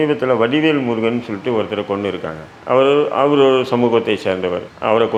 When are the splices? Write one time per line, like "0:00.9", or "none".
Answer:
none

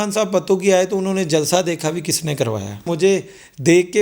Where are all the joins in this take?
0:02.9

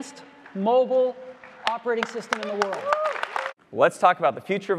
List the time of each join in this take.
0:03.6

